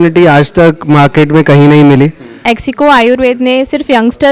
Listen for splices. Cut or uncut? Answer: cut